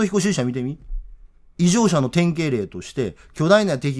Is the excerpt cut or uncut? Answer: uncut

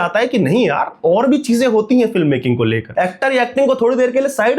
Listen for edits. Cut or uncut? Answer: cut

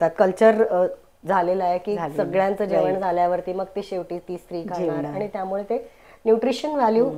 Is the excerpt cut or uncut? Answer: uncut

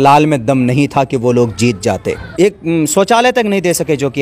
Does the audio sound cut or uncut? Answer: cut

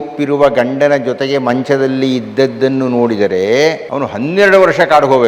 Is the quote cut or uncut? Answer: cut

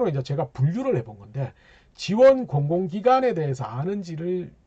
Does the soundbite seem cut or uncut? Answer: uncut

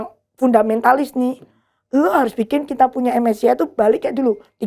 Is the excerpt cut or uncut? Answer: uncut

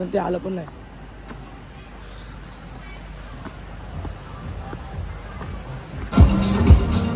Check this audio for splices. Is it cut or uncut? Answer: cut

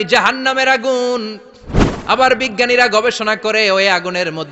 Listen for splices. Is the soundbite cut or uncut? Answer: uncut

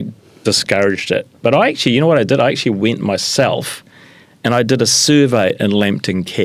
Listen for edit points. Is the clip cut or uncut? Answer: uncut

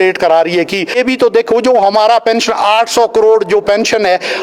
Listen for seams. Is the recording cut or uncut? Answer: cut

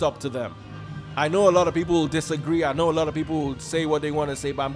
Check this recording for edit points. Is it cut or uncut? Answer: uncut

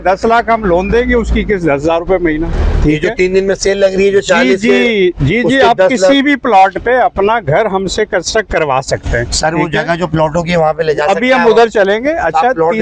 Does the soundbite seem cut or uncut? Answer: uncut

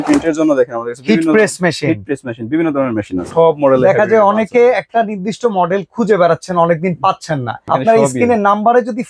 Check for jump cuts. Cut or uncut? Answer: cut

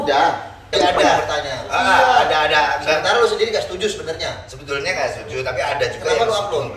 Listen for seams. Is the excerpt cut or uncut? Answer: cut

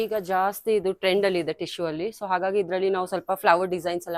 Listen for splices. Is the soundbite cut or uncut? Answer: uncut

